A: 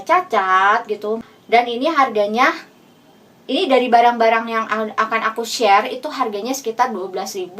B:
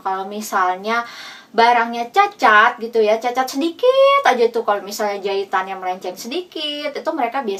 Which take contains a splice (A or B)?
A